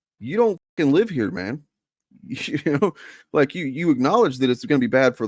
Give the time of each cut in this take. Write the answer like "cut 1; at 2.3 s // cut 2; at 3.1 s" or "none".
none